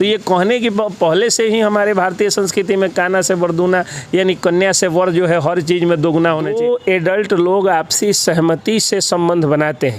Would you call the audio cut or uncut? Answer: cut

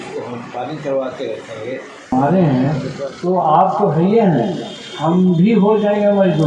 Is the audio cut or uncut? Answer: cut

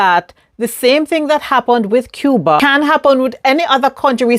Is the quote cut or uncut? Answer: cut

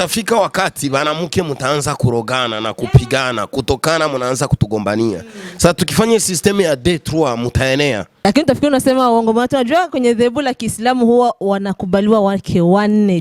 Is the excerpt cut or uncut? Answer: cut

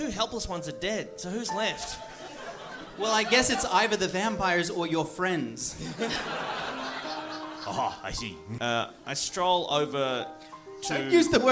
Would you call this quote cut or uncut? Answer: cut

